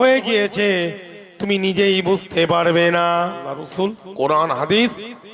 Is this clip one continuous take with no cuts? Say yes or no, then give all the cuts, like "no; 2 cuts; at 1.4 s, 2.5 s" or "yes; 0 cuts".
no; 1 cut; at 3.5 s